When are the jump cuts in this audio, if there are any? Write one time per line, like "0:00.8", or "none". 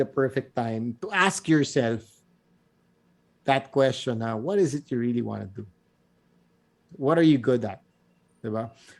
0:00.9